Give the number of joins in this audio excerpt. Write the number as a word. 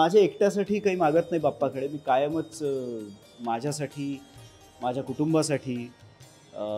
zero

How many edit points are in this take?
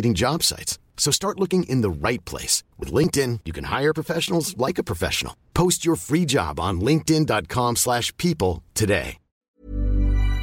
one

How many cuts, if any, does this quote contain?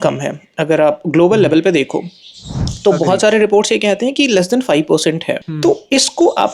one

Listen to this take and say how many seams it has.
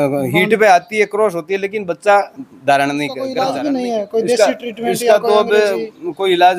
one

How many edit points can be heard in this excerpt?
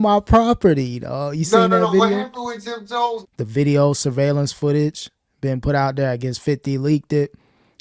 one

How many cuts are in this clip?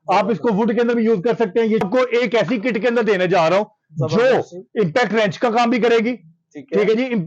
one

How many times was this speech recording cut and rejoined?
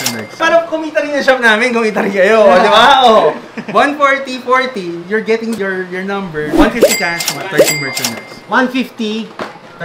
zero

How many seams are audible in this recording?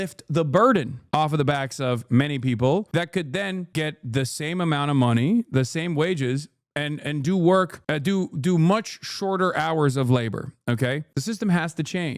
one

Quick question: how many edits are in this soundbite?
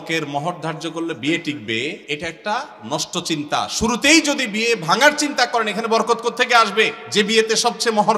two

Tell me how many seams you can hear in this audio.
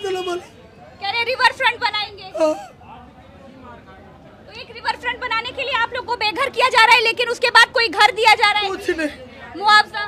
zero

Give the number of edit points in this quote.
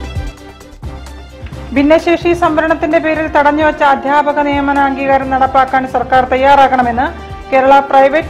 one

